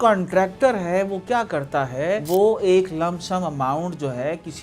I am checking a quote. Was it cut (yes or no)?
no